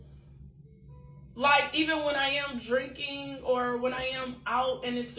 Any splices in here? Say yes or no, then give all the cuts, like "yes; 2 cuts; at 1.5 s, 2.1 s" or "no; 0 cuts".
no; 0 cuts